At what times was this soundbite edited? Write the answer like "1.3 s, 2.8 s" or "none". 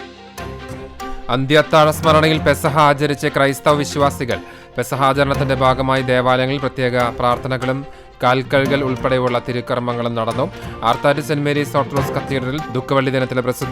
1.1 s